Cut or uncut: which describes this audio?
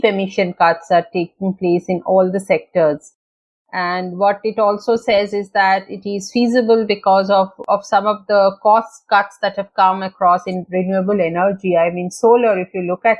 uncut